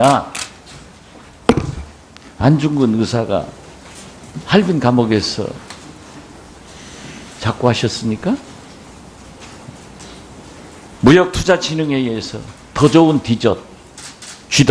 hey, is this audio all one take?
yes; 0 cuts

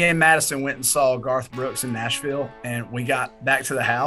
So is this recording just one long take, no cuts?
yes; 0 cuts

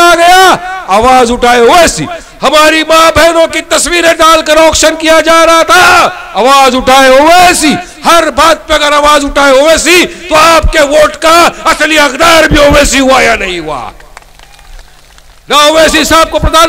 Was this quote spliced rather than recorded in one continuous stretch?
yes; 1 cut; at 15.5 s

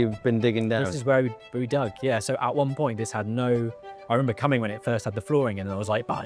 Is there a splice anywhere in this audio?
no; 0 cuts

